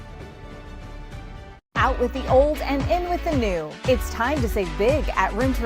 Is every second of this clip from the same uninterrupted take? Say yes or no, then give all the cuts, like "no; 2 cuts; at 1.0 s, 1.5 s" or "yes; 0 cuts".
no; 1 cut; at 1.5 s